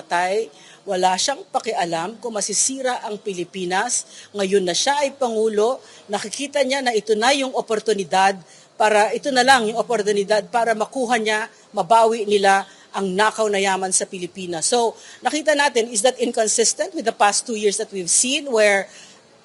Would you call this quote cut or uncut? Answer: uncut